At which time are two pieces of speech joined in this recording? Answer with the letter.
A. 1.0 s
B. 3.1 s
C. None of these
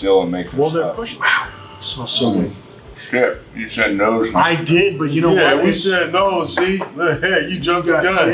A